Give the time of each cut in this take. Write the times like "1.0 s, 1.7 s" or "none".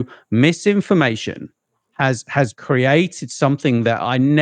2.5 s